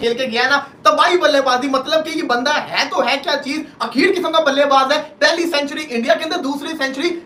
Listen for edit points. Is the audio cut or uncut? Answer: uncut